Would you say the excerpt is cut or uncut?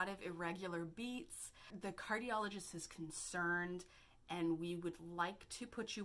cut